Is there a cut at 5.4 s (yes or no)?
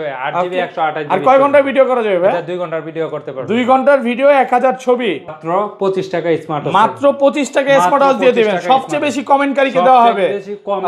yes